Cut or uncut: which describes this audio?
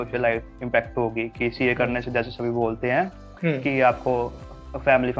uncut